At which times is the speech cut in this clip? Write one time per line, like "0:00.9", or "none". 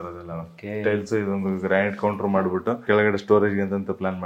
0:02.8